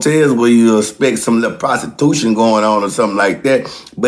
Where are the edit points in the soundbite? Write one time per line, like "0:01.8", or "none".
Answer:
none

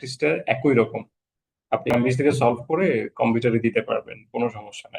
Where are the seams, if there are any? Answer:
0:01.9

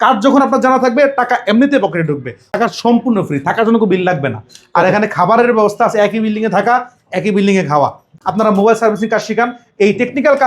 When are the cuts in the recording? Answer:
0:02.4
0:08.1

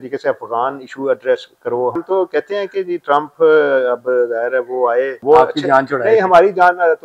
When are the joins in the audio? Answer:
0:02.0
0:05.2

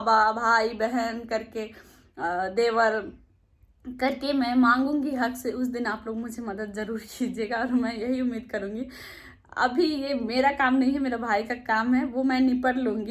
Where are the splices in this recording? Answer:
none

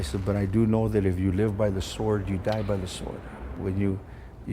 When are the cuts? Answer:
0:03.6

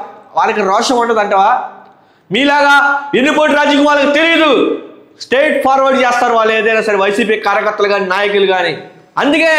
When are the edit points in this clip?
none

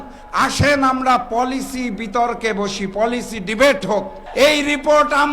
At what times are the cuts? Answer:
0:04.2

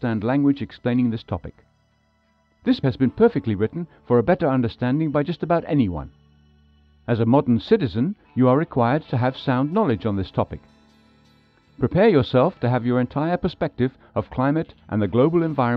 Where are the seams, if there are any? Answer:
0:08.7

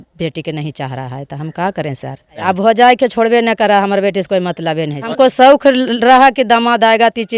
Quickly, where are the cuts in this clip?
0:02.4
0:05.1

